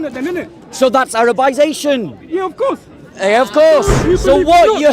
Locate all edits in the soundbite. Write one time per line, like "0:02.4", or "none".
0:03.9

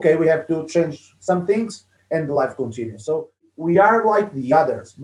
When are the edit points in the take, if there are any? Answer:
0:03.5

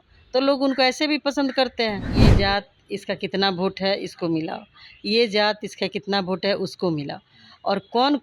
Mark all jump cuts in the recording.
0:02.3

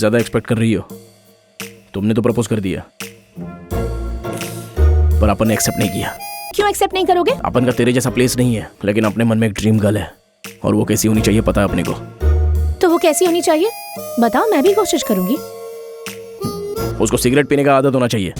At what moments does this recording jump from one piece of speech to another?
0:06.5
0:07.4
0:08.7

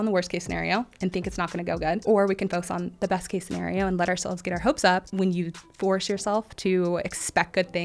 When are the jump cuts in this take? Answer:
0:02.0
0:05.1

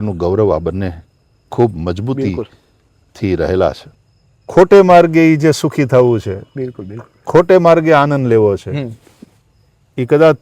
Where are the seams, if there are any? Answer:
0:03.9

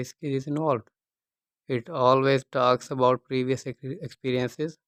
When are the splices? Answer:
none

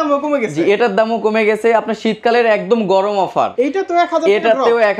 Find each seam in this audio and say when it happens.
0:03.5

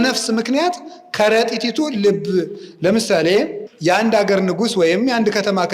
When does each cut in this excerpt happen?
0:03.6

